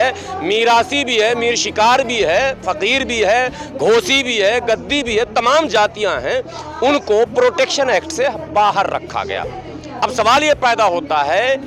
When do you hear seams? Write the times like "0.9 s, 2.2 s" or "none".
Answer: none